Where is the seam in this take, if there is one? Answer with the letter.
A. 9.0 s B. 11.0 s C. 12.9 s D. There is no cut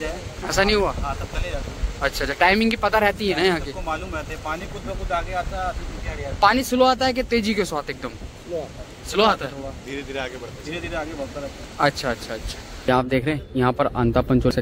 C